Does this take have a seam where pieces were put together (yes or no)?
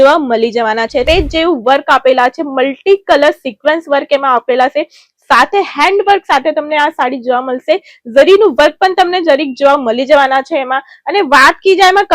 yes